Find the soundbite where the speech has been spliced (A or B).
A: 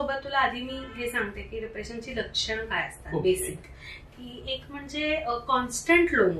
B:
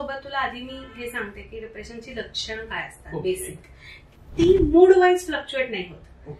B